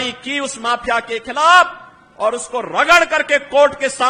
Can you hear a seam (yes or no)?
no